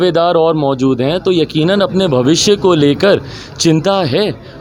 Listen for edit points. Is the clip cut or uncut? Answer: uncut